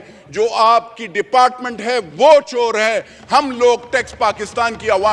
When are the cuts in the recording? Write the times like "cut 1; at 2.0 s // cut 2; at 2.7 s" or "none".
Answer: none